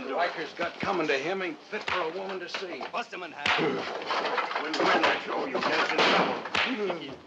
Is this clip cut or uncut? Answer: cut